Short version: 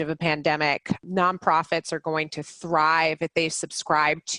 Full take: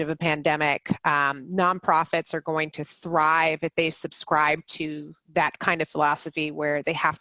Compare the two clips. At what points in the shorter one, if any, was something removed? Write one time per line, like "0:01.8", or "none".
0:01.0